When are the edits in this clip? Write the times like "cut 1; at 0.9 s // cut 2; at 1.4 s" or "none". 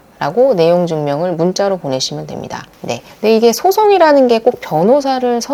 none